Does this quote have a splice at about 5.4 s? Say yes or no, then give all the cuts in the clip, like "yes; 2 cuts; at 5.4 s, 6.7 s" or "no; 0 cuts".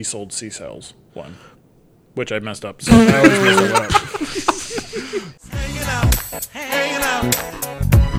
yes; 1 cut; at 5.4 s